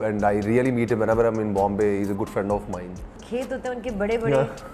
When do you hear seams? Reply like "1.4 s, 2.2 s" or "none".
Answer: 3.1 s